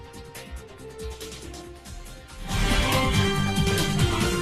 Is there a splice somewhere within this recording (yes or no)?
yes